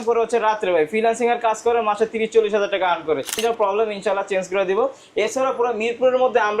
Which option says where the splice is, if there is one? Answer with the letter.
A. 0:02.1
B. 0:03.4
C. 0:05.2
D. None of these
B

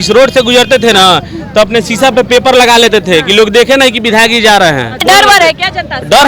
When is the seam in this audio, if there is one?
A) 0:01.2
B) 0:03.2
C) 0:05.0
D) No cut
C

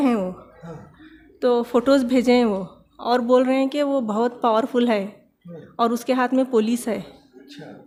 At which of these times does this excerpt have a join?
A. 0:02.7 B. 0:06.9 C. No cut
C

